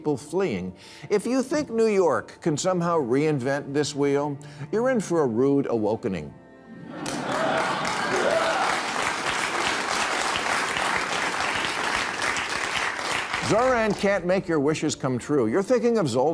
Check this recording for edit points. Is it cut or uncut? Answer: uncut